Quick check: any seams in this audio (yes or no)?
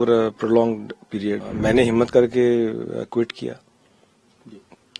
yes